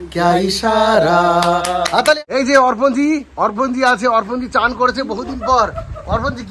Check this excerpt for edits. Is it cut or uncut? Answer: cut